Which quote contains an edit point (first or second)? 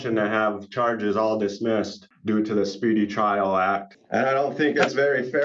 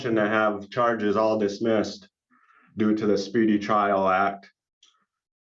first